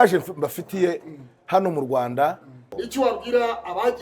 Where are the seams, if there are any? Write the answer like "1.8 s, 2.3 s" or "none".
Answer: 2.7 s